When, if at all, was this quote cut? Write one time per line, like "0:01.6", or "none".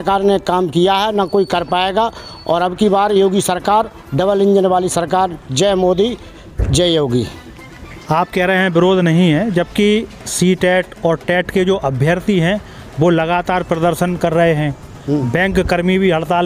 none